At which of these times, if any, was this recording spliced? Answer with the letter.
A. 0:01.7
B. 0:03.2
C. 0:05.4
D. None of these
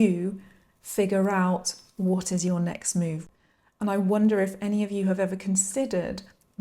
B